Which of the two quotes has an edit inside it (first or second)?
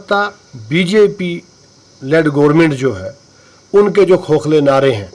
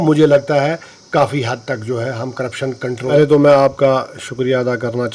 second